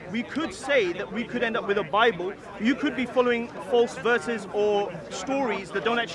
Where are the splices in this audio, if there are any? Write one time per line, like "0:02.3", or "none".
none